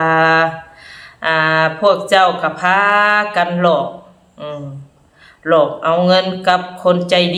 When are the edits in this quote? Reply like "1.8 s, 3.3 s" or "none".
none